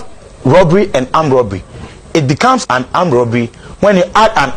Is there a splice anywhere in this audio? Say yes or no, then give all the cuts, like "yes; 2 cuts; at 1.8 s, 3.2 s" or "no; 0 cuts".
no; 0 cuts